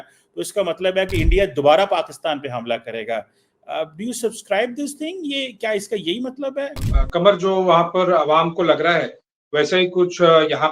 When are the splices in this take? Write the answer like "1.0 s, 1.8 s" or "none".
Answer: 6.9 s

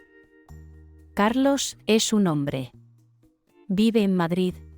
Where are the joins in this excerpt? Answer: 1.1 s

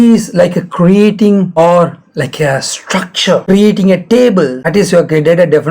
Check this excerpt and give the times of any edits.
1.5 s, 3.4 s, 4.6 s

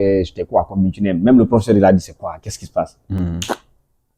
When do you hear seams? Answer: none

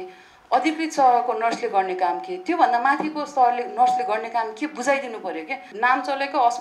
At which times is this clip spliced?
5.6 s

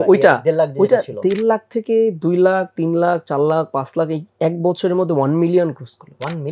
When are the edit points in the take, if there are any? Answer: none

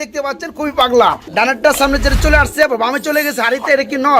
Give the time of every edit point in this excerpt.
1.2 s

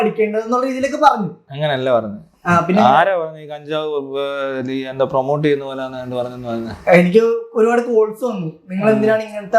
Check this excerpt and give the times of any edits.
none

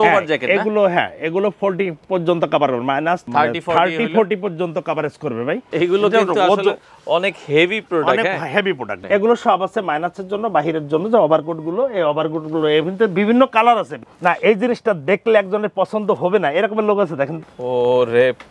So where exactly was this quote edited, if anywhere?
5.7 s, 8.9 s, 14.0 s, 17.4 s

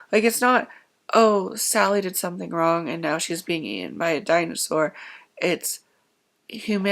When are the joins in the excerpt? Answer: none

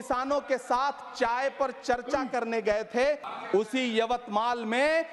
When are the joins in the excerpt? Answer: 3.3 s

